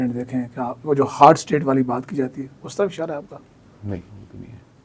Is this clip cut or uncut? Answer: uncut